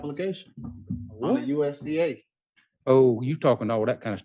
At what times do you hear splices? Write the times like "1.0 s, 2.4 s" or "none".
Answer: none